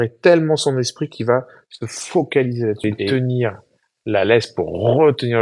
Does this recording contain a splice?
yes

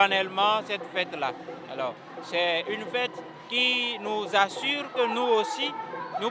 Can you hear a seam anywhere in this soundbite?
no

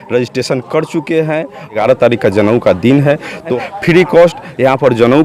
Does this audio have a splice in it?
yes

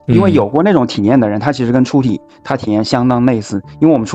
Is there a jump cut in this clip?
no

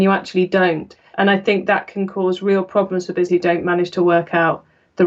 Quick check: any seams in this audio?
no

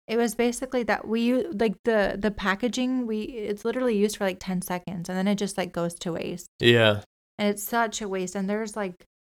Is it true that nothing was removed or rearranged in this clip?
yes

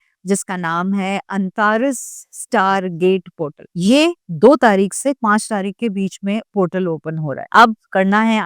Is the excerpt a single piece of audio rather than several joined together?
no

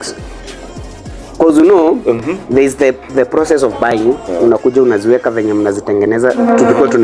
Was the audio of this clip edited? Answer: no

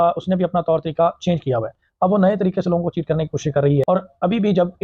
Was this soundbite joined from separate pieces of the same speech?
yes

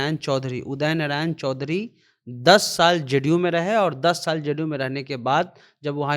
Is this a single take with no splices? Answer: yes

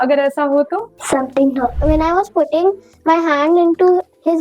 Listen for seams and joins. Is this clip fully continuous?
no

